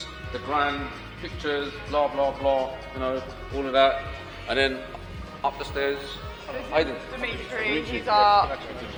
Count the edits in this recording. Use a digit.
0